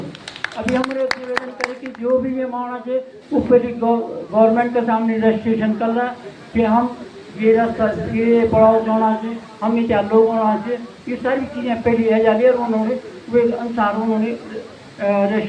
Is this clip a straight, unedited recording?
yes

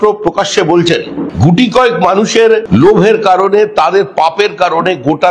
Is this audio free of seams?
no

